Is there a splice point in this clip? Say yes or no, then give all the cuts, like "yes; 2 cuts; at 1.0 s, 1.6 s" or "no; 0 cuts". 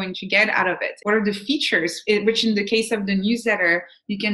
yes; 1 cut; at 1.0 s